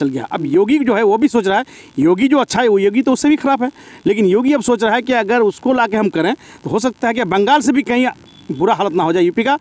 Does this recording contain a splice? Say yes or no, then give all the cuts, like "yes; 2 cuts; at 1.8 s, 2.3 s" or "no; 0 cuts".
no; 0 cuts